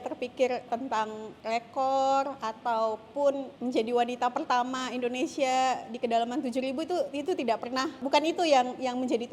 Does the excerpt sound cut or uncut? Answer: cut